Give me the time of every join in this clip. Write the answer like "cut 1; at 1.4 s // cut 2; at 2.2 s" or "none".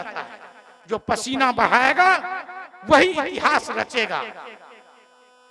none